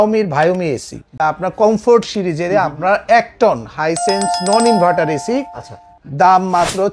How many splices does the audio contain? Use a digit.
1